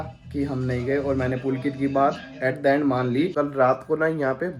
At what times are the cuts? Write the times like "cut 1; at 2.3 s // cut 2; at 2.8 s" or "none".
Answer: cut 1; at 3.3 s